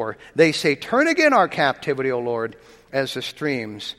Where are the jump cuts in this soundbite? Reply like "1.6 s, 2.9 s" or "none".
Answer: none